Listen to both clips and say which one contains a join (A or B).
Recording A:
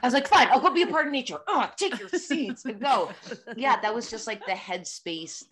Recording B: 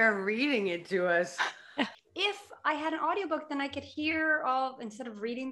B